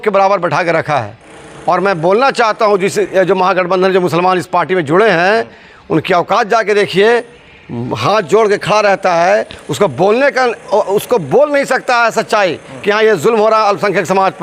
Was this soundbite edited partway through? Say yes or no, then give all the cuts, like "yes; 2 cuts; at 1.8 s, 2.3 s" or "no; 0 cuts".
no; 0 cuts